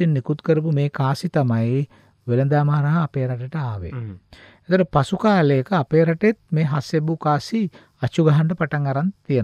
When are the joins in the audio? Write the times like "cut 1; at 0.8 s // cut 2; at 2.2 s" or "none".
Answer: none